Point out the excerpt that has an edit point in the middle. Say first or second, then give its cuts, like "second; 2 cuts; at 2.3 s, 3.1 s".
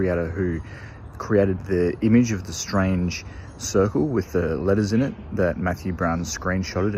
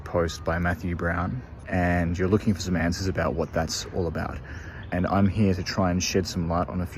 second; 2 cuts; at 1.5 s, 4.8 s